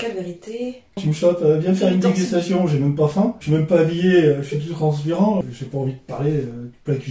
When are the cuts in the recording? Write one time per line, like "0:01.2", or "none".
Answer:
0:01.0
0:03.4
0:05.4